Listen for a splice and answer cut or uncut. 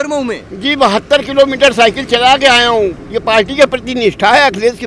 uncut